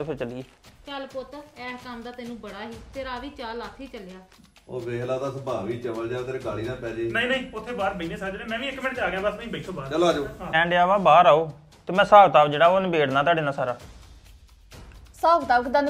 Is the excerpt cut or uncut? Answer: cut